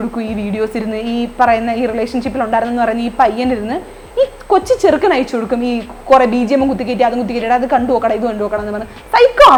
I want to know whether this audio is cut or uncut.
uncut